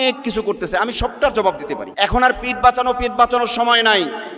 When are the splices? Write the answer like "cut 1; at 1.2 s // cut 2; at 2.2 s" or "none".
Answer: cut 1; at 1.8 s